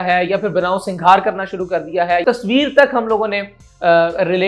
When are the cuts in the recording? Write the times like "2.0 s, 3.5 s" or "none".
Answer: 2.2 s